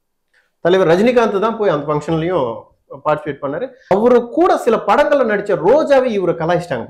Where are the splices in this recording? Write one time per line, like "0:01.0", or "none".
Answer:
0:03.9